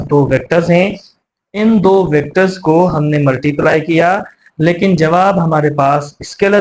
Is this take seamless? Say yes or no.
yes